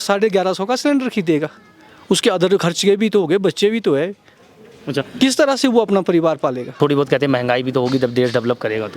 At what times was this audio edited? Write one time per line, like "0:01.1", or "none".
0:06.7